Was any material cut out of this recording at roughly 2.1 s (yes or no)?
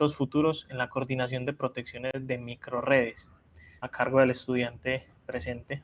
yes